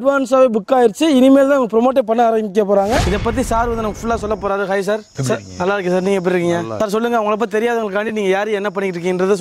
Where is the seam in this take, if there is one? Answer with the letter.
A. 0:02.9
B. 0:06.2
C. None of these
C